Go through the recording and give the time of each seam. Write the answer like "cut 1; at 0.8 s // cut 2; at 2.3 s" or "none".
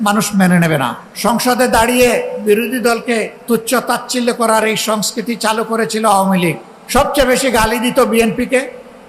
cut 1; at 1.0 s // cut 2; at 3.3 s // cut 3; at 6.7 s